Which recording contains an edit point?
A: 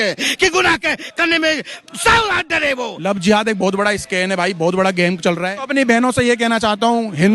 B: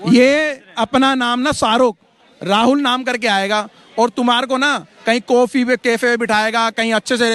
A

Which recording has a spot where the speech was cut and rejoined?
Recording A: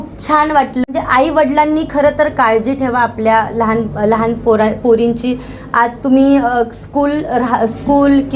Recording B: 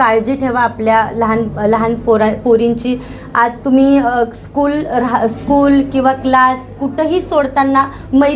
A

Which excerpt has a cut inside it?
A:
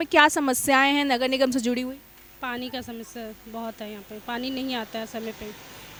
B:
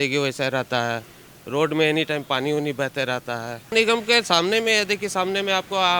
B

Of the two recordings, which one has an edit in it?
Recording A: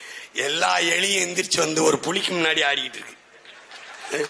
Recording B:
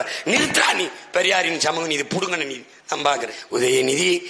B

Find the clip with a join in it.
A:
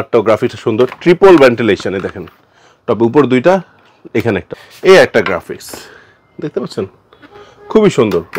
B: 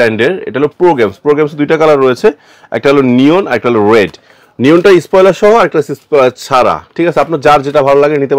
A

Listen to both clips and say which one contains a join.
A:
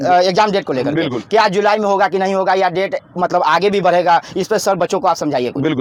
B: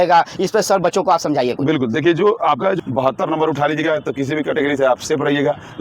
B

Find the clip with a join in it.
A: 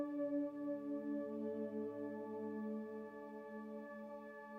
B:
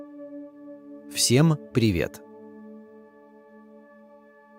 B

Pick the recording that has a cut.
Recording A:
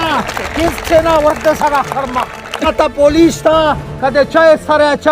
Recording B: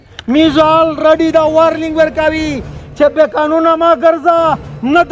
A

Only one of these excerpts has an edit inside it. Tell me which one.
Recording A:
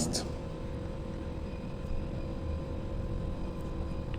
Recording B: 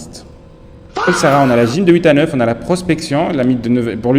B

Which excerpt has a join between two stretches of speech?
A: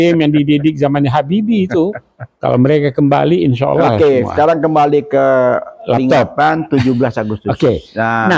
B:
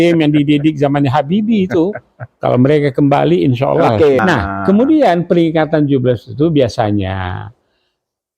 B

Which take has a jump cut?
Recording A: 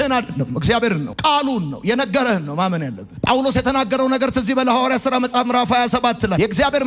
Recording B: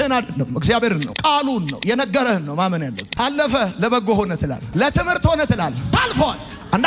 B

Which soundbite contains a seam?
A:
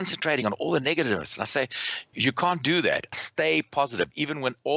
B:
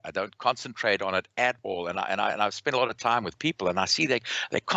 A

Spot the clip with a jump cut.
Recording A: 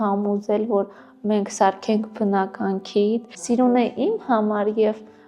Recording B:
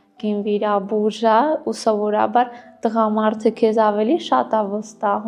A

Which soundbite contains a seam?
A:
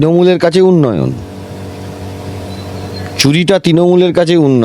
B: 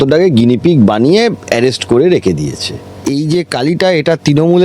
B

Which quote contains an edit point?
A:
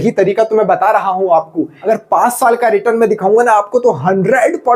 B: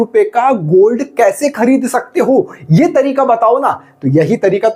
A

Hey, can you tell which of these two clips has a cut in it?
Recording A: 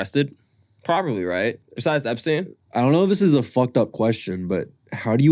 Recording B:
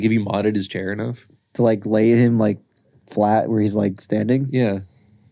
A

